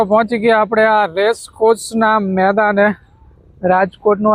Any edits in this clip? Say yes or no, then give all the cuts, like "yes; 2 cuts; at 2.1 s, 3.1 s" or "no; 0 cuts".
no; 0 cuts